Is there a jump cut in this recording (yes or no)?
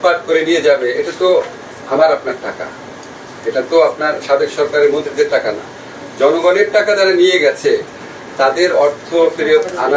no